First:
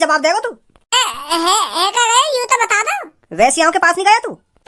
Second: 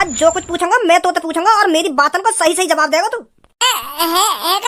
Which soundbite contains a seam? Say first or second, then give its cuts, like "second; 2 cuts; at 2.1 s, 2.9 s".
first; 1 cut; at 3.2 s